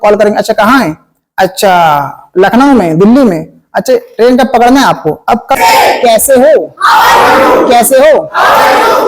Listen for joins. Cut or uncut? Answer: cut